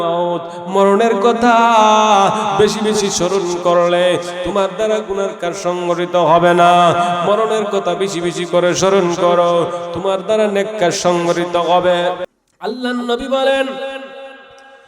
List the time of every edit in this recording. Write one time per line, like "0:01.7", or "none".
0:12.3